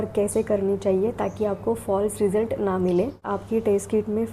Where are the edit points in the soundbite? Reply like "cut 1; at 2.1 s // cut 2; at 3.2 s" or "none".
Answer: cut 1; at 3.3 s